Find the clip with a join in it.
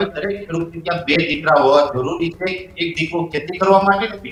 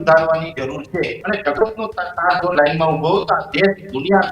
second; 1 cut; at 1.2 s

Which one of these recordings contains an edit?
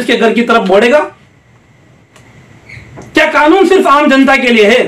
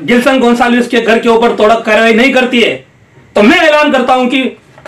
first; 1 cut; at 2.2 s

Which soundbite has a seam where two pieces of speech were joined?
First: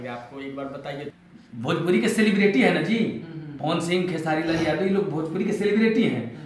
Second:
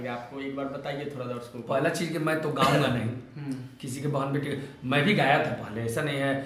first; 1 cut; at 1.1 s

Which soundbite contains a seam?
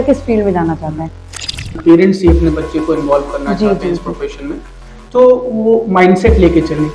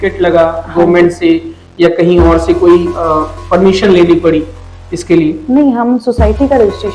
first; 1 cut; at 1.4 s

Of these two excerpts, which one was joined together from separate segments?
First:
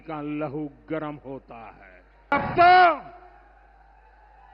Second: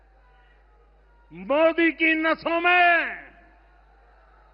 first; 1 cut; at 2.3 s

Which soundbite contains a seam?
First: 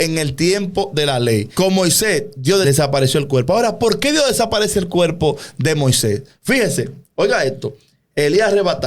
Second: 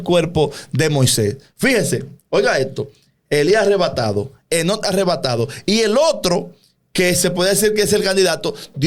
first; 2 cuts; at 1.5 s, 2.6 s

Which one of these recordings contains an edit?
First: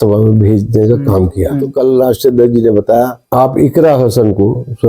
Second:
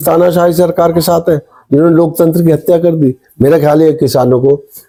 first; 2 cuts; at 1.7 s, 3.2 s

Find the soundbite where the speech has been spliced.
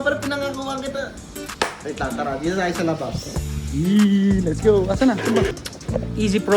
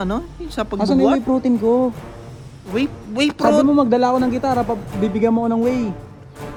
first; 1 cut; at 5.5 s

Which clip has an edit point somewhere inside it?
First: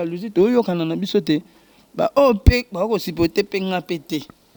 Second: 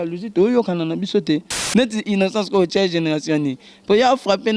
second; 1 cut; at 1.6 s

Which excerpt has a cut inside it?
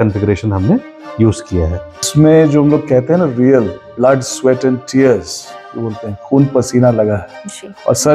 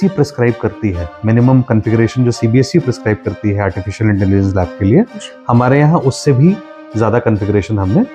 first; 1 cut; at 2.1 s

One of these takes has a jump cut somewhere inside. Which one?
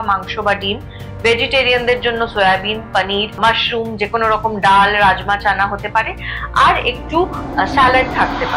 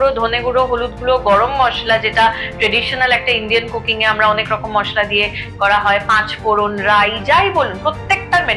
first; 1 cut; at 3.4 s

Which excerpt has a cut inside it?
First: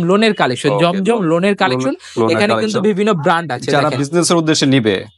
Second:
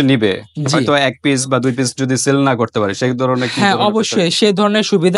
first; 1 cut; at 3.6 s

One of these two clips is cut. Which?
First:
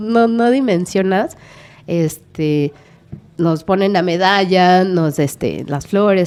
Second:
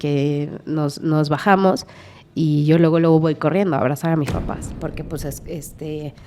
second; 1 cut; at 4.6 s

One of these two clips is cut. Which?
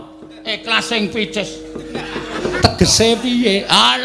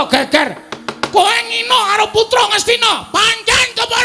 first; 1 cut; at 2.4 s

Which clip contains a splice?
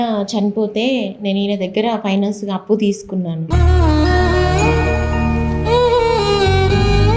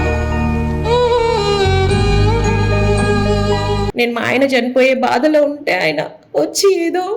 second; 1 cut; at 3.9 s

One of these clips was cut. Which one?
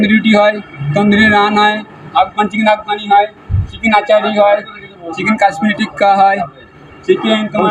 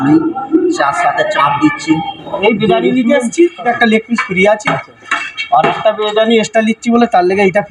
second; 2 cuts; at 2.2 s, 3.7 s

